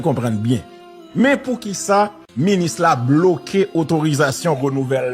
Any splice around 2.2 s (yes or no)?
yes